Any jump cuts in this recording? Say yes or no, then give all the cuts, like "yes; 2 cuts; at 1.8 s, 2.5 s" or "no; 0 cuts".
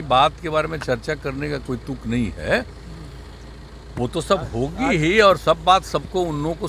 no; 0 cuts